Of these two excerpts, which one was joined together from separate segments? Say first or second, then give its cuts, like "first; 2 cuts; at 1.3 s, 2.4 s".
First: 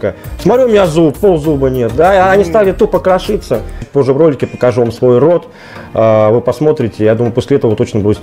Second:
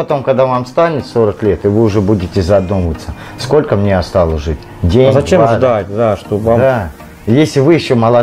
first; 1 cut; at 3.8 s